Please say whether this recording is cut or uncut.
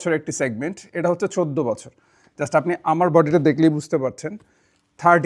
uncut